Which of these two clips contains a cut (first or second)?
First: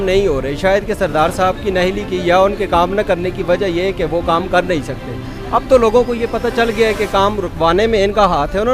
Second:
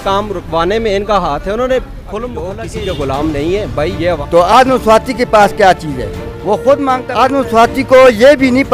second